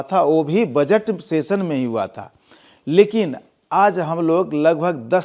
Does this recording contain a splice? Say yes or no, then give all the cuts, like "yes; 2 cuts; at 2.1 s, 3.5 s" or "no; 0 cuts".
no; 0 cuts